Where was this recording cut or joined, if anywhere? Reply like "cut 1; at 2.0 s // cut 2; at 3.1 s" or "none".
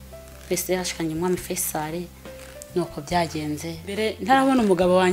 cut 1; at 4.0 s

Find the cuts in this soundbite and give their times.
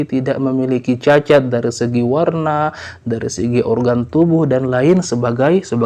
none

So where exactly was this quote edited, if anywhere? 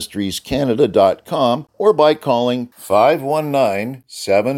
cut 1; at 1.7 s

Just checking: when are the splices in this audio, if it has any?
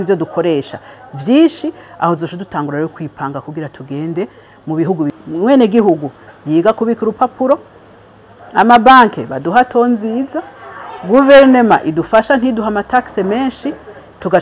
cut 1; at 5.1 s

